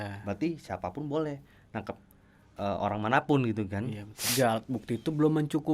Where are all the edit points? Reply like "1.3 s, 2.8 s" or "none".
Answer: 4.3 s